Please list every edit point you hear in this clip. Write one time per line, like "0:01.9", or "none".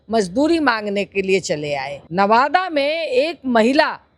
0:02.0